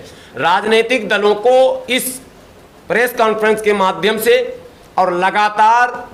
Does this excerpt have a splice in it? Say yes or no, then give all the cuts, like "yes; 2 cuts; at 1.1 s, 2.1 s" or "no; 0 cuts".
no; 0 cuts